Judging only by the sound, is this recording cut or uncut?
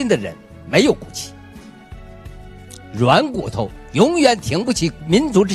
uncut